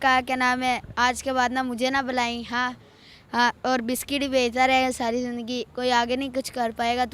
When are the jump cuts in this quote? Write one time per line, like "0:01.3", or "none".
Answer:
none